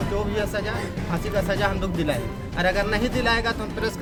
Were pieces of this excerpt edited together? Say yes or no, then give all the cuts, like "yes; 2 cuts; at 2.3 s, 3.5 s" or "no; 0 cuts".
no; 0 cuts